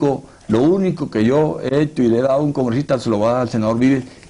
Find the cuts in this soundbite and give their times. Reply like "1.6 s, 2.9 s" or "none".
none

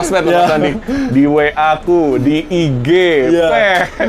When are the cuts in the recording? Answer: none

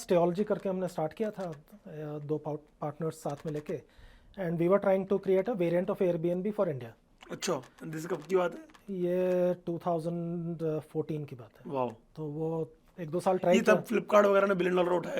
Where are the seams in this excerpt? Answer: 12.1 s

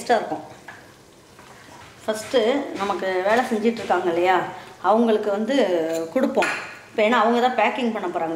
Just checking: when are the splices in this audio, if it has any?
1.7 s

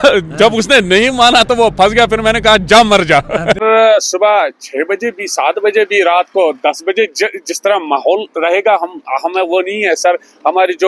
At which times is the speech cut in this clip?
3.6 s

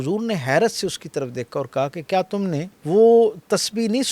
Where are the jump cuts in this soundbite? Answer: 2.7 s

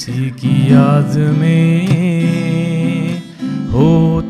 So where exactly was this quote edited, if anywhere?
none

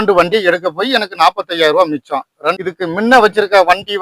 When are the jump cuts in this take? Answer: 2.4 s

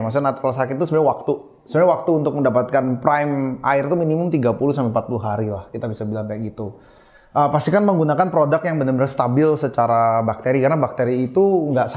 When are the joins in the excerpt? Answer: none

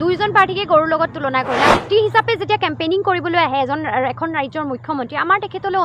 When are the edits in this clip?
1.8 s

